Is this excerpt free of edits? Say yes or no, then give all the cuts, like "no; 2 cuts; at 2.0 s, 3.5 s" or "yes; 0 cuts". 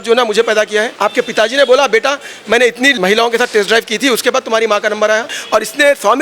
no; 3 cuts; at 0.9 s, 3.0 s, 5.4 s